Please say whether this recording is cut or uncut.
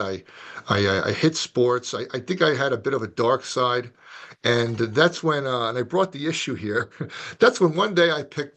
uncut